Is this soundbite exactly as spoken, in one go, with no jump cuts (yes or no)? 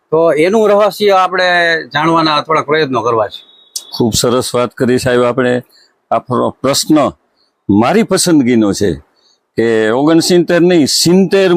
yes